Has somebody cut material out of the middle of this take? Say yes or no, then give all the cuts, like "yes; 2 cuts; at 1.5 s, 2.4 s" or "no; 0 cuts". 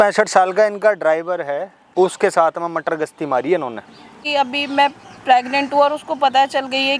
yes; 2 cuts; at 1.7 s, 4.2 s